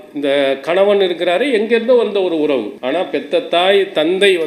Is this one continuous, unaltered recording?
no; 1 cut; at 2.7 s

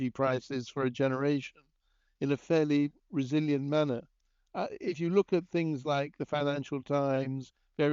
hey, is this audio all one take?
yes; 0 cuts

